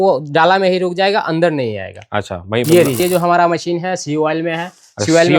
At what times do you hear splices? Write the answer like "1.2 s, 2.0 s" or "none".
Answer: 3.0 s